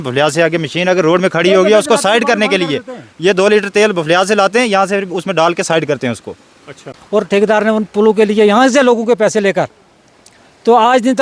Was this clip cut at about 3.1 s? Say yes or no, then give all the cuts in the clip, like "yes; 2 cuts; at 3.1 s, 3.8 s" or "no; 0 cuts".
no; 1 cut; at 6.9 s